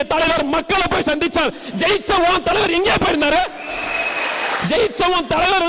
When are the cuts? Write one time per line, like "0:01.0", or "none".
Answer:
none